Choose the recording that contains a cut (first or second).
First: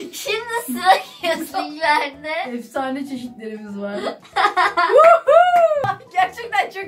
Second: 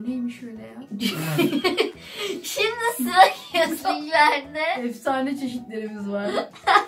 first